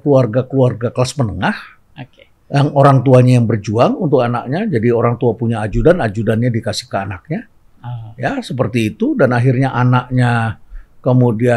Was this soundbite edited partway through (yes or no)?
no